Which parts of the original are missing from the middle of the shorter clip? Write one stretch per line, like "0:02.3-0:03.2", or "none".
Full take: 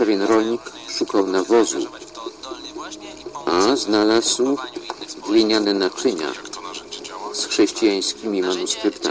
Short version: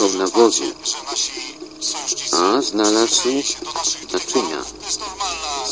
0:05.3-0:05.8